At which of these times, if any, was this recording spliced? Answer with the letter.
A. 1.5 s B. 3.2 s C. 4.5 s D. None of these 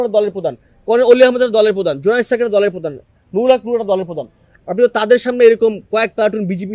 D